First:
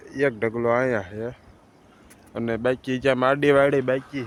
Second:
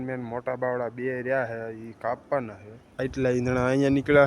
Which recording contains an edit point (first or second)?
second